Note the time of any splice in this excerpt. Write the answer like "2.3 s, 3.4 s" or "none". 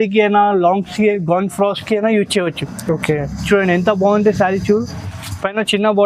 none